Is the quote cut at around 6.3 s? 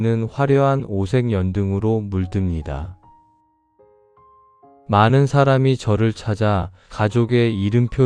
no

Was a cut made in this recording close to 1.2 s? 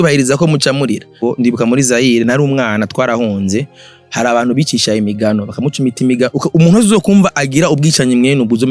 yes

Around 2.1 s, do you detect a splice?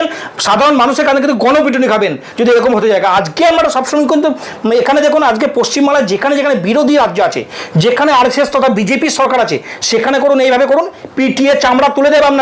no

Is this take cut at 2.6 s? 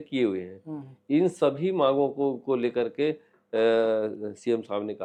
no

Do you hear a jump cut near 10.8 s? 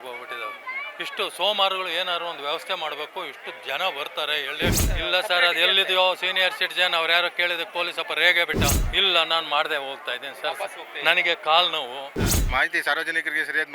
no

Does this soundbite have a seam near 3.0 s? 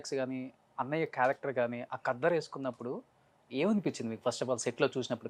no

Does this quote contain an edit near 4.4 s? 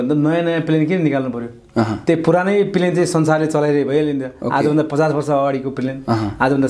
no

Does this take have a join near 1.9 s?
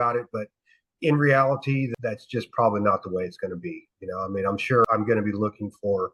yes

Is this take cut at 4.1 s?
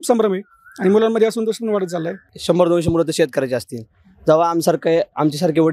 no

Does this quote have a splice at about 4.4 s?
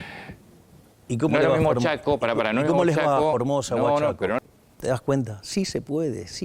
yes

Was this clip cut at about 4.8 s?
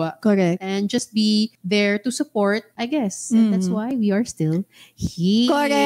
no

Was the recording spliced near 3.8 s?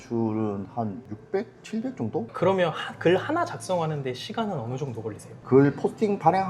no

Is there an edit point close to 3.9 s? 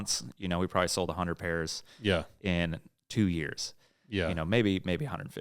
no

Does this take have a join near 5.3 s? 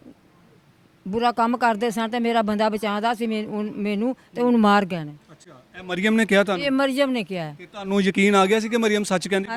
no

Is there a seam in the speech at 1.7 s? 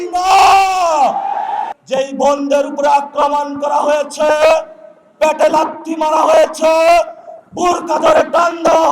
yes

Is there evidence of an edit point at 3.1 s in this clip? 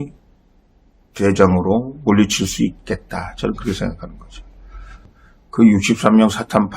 no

